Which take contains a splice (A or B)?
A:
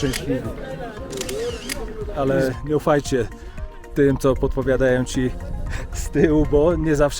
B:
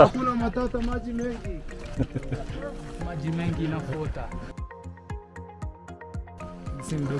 A